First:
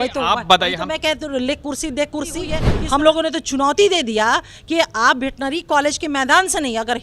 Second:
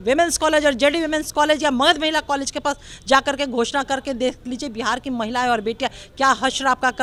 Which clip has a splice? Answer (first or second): first